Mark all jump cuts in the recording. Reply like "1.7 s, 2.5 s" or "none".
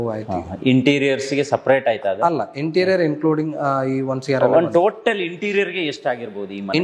none